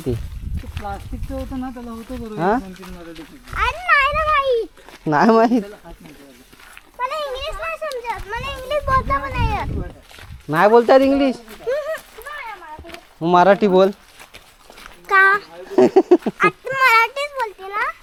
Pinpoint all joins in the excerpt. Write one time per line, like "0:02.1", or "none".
none